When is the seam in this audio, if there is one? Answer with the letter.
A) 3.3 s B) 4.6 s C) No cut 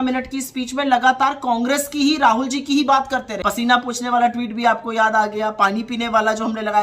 A